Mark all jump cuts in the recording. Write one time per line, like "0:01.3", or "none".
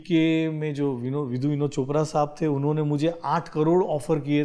none